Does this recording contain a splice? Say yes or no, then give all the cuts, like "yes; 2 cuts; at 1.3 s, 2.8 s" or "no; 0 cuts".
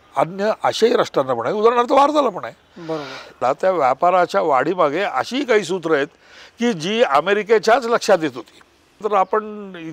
yes; 2 cuts; at 3.4 s, 9.0 s